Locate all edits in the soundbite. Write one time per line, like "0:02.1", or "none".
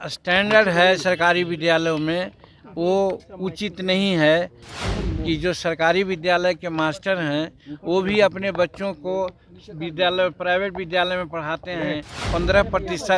0:04.8
0:12.3